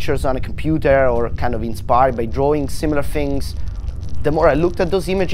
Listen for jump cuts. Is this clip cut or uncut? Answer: cut